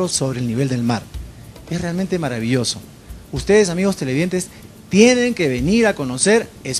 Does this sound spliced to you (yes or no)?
yes